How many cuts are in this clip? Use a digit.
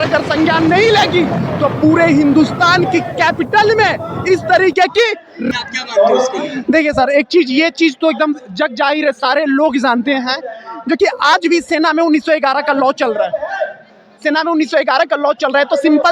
1